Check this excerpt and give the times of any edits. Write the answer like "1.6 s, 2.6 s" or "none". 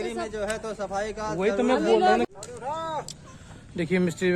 2.3 s